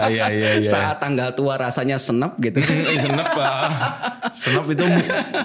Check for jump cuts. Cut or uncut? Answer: uncut